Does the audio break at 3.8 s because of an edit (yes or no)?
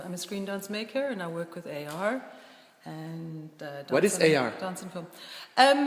yes